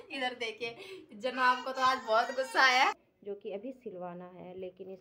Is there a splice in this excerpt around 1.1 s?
no; 1 cut; at 3.1 s

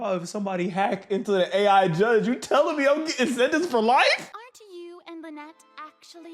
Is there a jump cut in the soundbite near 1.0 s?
no; 1 cut; at 4.3 s

